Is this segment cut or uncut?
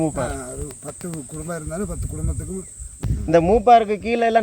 cut